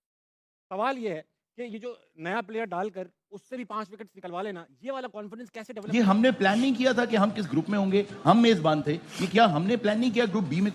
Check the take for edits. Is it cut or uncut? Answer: cut